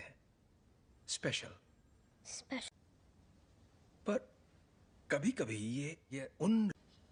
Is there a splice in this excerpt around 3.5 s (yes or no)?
no